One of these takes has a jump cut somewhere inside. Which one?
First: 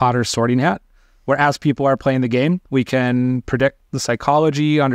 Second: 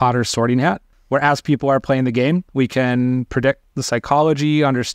second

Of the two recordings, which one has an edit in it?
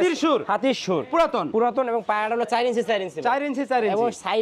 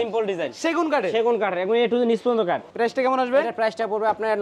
second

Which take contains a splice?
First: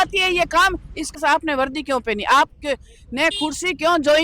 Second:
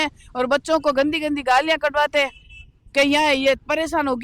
first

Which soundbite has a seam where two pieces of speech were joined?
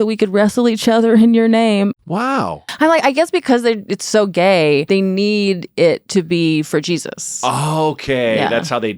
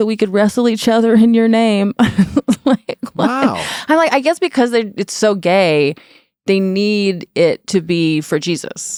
first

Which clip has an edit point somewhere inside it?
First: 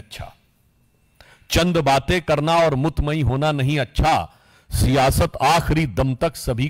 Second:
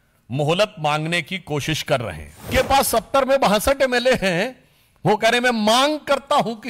second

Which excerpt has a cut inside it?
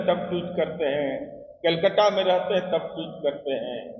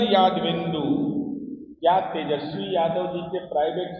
second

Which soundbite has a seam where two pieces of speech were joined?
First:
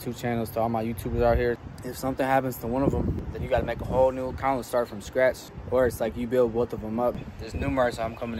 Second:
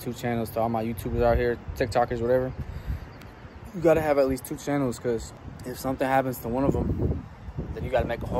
first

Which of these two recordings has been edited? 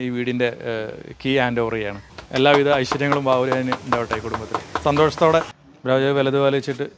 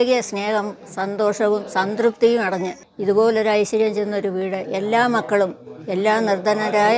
first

